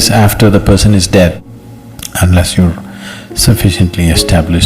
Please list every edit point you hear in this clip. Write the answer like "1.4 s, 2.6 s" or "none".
1.4 s